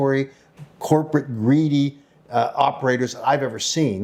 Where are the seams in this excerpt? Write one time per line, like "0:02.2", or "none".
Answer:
none